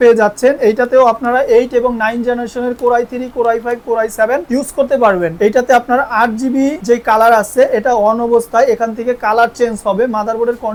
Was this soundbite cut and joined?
no; 0 cuts

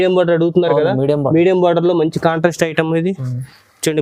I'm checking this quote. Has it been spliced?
no; 0 cuts

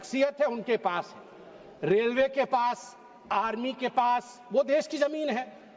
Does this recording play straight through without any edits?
yes; 0 cuts

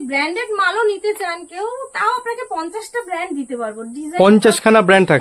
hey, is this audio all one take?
yes; 0 cuts

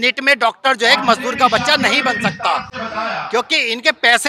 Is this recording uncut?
yes; 0 cuts

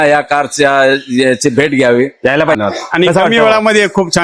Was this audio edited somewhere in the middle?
yes; 1 cut; at 2.6 s

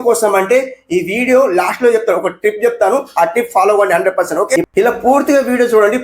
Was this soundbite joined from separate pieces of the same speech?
yes; 1 cut; at 4.6 s

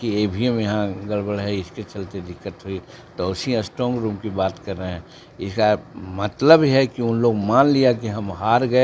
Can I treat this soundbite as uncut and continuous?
yes; 0 cuts

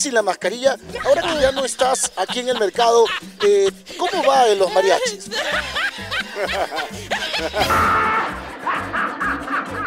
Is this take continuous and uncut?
yes; 0 cuts

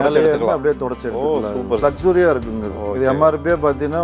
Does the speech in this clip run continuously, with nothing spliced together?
no; 1 cut; at 1.8 s

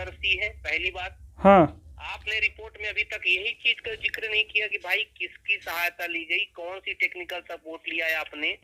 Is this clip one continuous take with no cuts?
yes; 0 cuts

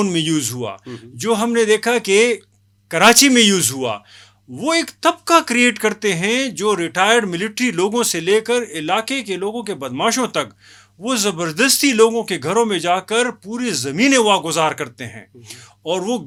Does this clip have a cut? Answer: no; 0 cuts

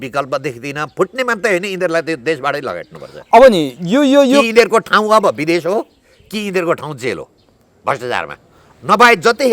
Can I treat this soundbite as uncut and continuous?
yes; 0 cuts

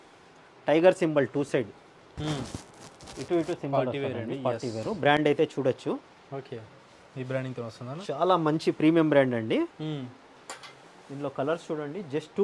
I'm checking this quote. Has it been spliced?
no; 0 cuts

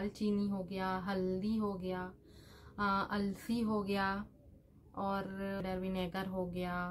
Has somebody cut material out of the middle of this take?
no; 0 cuts

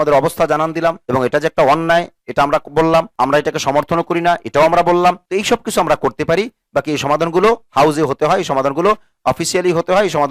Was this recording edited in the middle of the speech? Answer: no; 0 cuts

